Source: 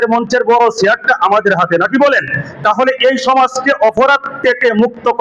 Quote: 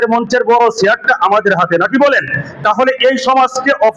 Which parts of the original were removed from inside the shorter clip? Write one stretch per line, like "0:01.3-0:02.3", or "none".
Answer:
none